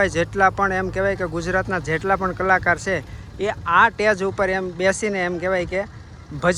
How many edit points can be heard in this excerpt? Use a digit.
0